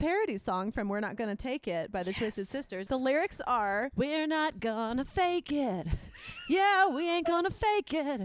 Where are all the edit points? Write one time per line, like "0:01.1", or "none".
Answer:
0:02.8
0:03.9